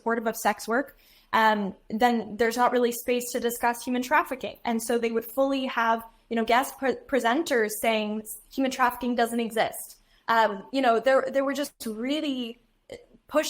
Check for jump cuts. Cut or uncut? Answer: uncut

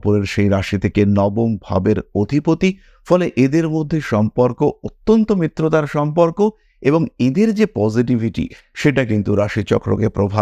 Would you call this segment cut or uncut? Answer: uncut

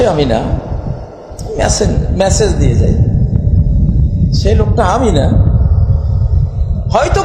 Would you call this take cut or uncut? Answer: uncut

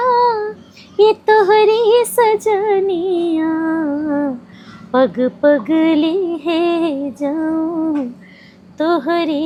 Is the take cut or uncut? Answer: uncut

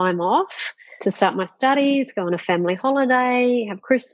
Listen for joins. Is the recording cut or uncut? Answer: uncut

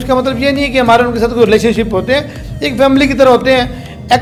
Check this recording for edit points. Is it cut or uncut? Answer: uncut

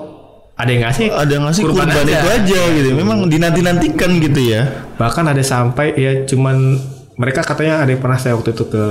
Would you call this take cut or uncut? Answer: uncut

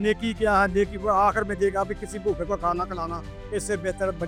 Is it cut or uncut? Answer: uncut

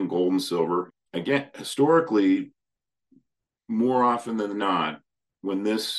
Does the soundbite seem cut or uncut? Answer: cut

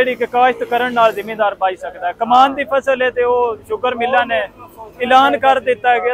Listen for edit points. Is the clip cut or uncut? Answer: uncut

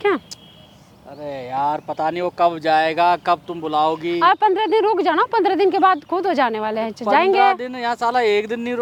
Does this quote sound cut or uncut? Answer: uncut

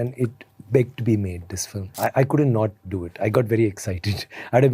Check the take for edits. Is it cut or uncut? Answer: cut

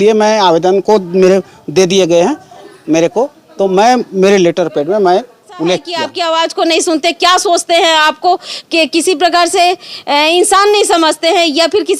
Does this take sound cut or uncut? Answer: cut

